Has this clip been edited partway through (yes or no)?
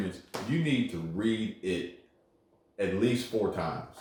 no